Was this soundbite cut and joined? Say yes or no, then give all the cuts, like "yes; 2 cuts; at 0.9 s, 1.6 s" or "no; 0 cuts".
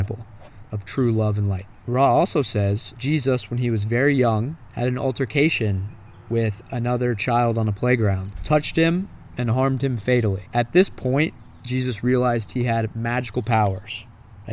yes; 5 cuts; at 1.7 s, 2.9 s, 4.6 s, 8.3 s, 10.4 s